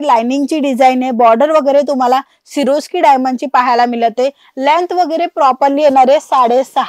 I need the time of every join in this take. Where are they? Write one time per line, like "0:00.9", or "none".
none